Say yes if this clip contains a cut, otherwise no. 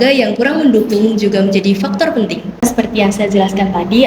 yes